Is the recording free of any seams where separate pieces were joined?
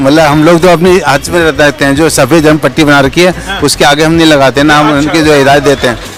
yes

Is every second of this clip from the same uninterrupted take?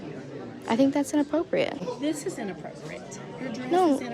no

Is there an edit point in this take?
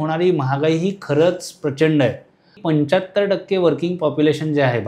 yes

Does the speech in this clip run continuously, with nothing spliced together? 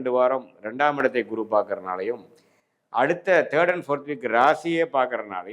yes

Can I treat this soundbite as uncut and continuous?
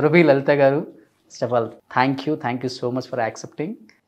no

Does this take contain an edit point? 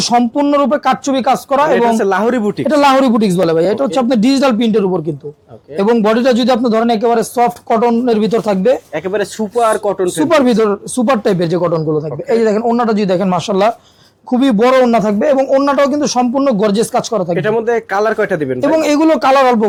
no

